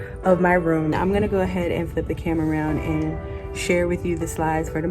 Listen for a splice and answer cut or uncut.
cut